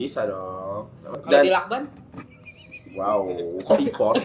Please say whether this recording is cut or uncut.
cut